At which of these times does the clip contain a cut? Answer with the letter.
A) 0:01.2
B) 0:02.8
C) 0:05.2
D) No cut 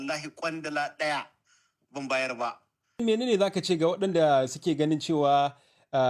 B